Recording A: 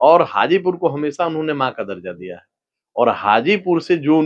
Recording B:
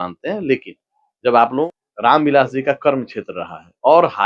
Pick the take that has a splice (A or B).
B